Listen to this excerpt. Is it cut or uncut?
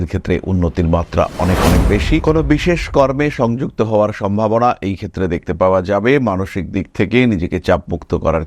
cut